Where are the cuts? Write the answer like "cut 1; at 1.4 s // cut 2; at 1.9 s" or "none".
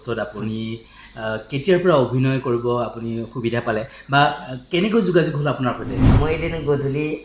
cut 1; at 6.1 s